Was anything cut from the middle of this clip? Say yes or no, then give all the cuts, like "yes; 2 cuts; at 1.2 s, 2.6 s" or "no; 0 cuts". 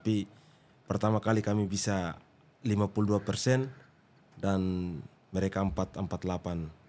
no; 0 cuts